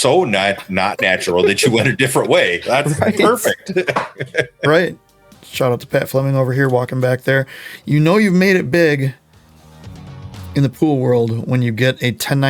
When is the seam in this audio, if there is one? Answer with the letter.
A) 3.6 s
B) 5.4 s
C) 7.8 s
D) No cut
B